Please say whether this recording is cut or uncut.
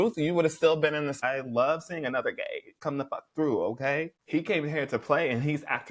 cut